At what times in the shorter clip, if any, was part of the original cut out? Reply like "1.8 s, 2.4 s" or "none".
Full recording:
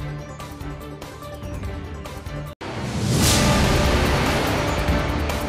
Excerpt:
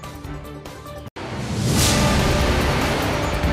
1.1 s